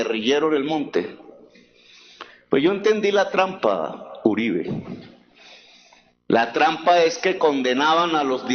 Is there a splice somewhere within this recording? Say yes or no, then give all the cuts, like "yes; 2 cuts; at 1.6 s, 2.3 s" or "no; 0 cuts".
no; 0 cuts